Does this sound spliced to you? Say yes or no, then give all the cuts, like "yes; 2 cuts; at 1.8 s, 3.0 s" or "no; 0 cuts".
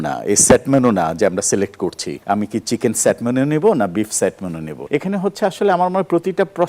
yes; 2 cuts; at 2.1 s, 4.7 s